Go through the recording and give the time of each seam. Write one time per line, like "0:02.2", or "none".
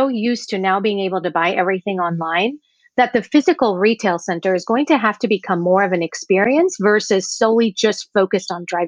none